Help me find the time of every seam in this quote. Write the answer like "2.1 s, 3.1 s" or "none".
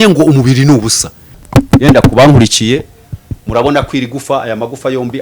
1.4 s